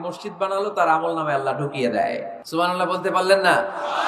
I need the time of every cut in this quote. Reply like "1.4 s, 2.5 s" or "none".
2.4 s